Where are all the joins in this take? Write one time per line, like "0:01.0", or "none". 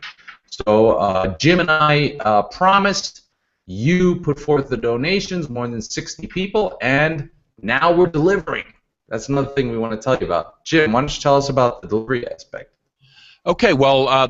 none